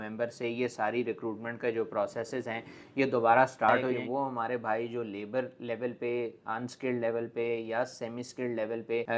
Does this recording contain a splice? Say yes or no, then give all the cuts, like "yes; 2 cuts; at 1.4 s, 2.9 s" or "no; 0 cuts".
yes; 1 cut; at 4.0 s